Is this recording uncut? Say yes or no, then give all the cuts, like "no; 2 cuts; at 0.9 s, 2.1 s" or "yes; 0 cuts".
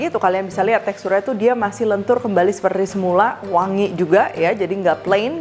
yes; 0 cuts